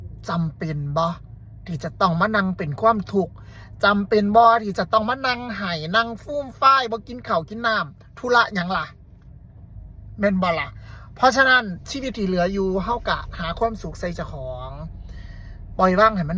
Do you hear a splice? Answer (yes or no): no